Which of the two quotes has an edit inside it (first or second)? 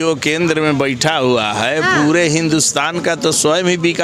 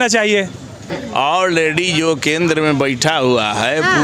second